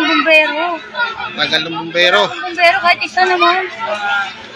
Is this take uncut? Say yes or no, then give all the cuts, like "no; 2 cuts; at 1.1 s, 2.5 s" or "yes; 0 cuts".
yes; 0 cuts